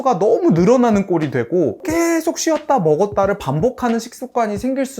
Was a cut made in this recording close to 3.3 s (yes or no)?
no